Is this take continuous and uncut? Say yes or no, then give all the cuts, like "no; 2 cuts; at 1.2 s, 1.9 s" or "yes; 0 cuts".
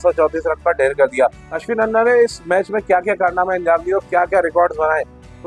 yes; 0 cuts